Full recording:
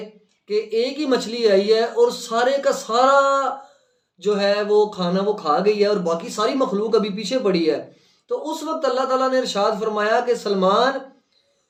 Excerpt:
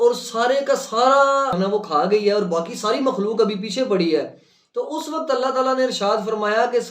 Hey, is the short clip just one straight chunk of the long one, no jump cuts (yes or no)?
no